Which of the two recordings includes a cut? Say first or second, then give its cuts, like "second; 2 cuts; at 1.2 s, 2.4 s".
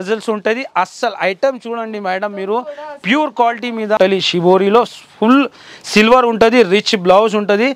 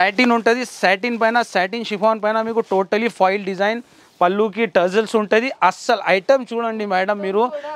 first; 1 cut; at 4.0 s